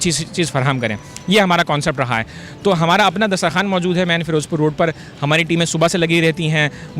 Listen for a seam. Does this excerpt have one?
no; 0 cuts

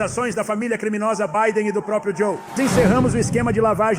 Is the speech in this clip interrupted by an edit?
yes; 1 cut; at 2.6 s

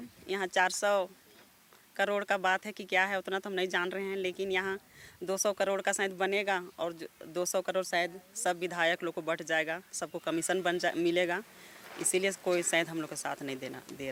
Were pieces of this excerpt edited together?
no; 0 cuts

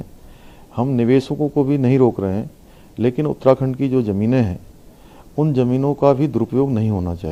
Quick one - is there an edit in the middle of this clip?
no; 0 cuts

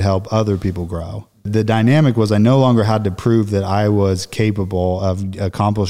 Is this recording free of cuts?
no; 1 cut; at 1.5 s

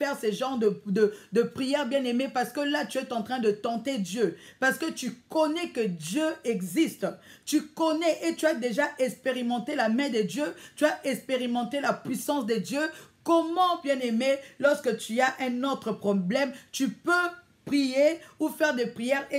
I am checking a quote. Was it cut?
no; 0 cuts

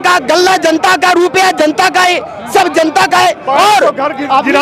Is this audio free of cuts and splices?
yes; 0 cuts

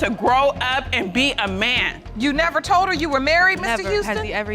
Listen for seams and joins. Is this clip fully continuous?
no; 1 cut; at 1.9 s

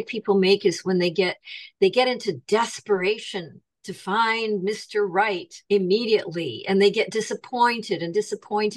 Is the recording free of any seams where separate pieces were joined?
no; 1 cut; at 5.5 s

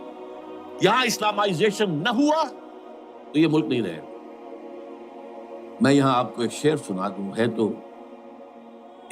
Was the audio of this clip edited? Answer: yes; 2 cuts; at 4.0 s, 5.8 s

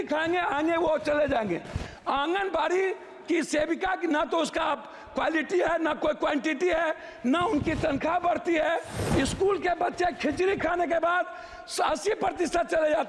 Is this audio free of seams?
no; 1 cut; at 8.9 s

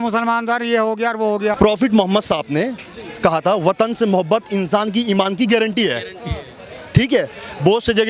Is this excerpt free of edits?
no; 1 cut; at 1.5 s

